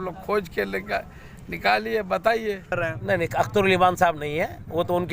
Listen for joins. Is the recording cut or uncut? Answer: cut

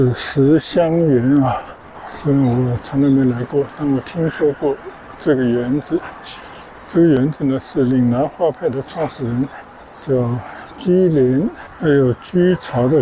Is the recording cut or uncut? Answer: uncut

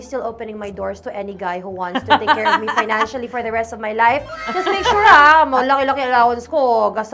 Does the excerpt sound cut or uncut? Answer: uncut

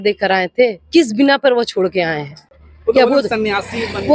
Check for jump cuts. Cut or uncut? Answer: uncut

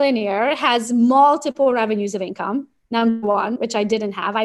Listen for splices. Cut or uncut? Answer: uncut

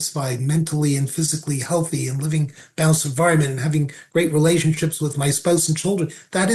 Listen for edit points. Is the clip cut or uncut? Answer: uncut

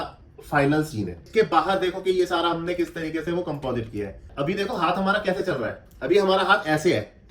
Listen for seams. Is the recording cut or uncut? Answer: cut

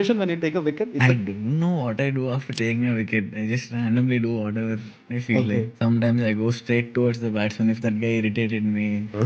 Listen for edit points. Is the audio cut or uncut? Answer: cut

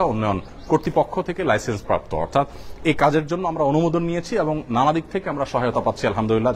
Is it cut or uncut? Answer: uncut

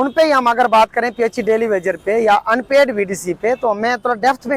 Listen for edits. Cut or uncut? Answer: uncut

